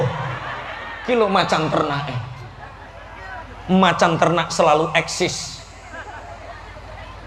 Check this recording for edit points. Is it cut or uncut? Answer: uncut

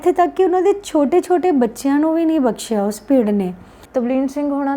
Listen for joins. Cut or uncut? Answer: cut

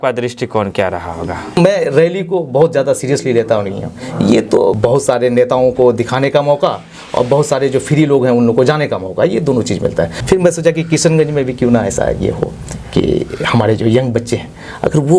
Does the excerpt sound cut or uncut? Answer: cut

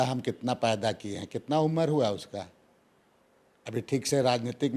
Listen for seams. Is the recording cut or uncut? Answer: uncut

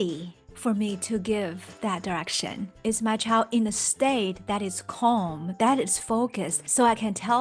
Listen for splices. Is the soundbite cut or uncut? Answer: uncut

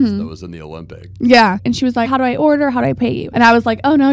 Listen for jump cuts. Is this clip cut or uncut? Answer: cut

